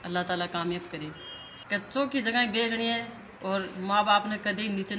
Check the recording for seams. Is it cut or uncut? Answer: cut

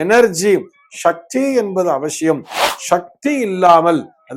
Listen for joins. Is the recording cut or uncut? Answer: cut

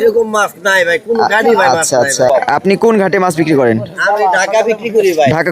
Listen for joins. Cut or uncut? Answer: cut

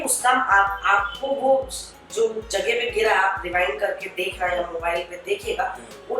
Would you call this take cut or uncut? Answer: uncut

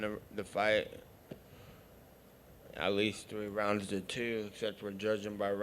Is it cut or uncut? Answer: cut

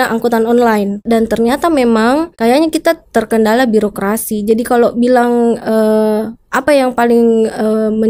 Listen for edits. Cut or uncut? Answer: cut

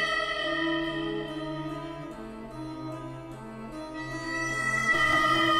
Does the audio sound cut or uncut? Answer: uncut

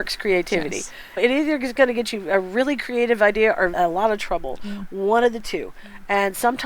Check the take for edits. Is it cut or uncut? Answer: cut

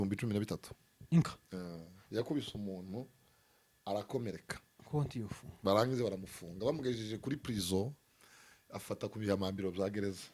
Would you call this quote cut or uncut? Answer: uncut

